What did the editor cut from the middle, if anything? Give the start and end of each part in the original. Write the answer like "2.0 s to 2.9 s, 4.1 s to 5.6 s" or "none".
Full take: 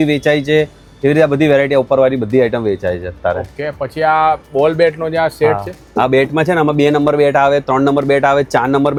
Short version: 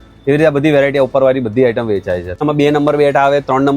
3.2 s to 6.6 s